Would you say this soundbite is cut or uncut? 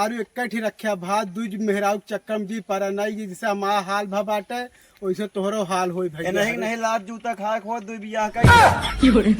cut